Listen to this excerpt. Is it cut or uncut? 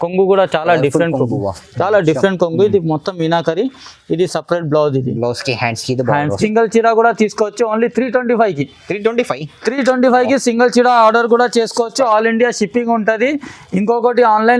cut